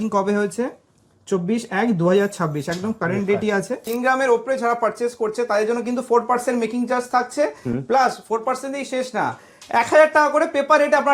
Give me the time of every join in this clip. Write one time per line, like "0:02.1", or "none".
0:03.8